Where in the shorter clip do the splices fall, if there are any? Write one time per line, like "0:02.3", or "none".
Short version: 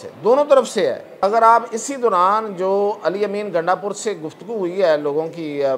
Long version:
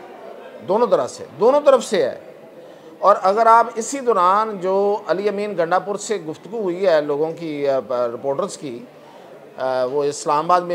0:01.2